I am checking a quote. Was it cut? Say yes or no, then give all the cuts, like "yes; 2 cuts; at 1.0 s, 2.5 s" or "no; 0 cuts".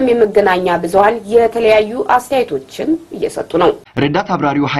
yes; 1 cut; at 3.9 s